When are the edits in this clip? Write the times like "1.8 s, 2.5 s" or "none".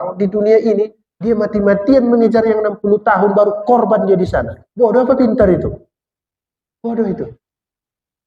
none